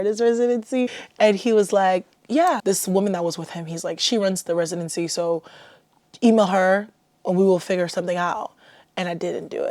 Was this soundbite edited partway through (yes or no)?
yes